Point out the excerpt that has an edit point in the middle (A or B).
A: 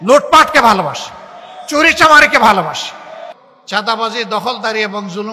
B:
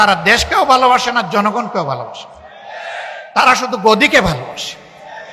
A